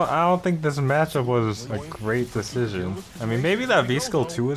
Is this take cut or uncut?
cut